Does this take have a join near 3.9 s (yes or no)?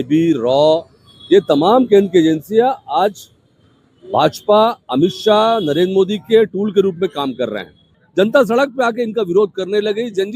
no